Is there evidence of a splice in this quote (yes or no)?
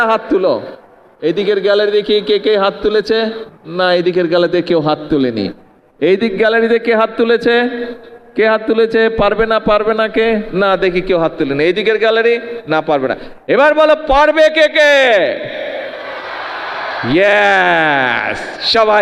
no